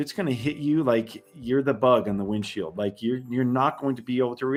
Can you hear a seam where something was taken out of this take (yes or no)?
no